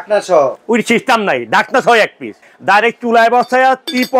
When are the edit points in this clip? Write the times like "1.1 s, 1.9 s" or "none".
2.4 s